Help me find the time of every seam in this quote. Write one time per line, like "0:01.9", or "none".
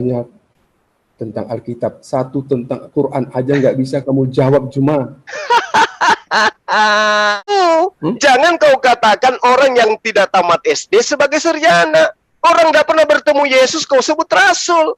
0:07.5

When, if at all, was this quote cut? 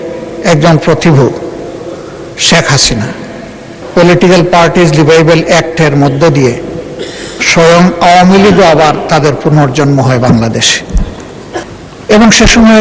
0:03.8
0:11.7

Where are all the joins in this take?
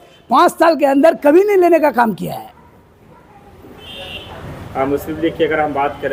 none

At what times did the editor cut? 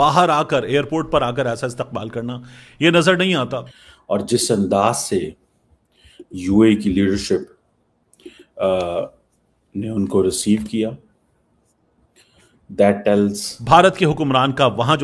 0:03.8
0:13.5

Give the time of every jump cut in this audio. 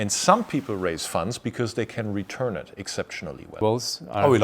0:03.5

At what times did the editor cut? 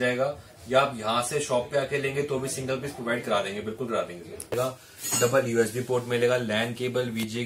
0:04.5

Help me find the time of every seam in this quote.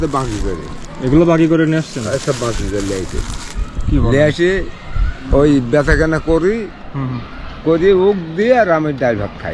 none

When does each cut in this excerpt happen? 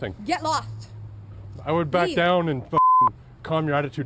none

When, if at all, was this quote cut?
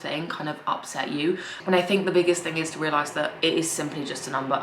0:01.6

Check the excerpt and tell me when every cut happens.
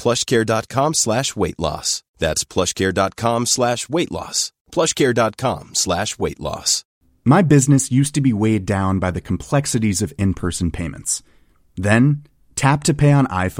0:06.8

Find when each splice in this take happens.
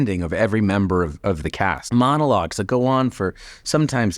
0:01.8

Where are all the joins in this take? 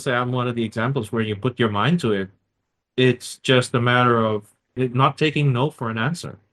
0:04.8

